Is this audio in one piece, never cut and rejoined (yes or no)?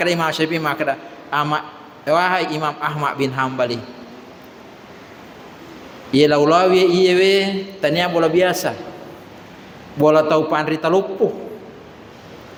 yes